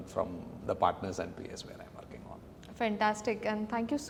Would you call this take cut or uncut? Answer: uncut